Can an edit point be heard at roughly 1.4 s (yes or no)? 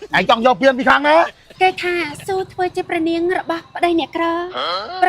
yes